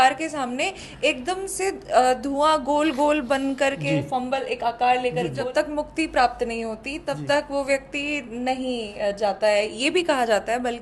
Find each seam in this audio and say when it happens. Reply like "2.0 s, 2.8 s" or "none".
5.3 s